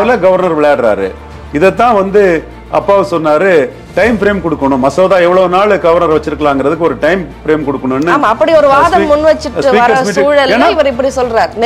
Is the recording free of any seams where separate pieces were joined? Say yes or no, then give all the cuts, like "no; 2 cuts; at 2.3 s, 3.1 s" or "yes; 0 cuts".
yes; 0 cuts